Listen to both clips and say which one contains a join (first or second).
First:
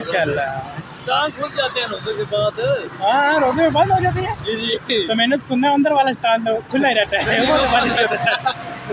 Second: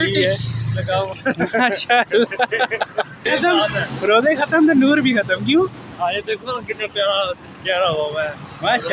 second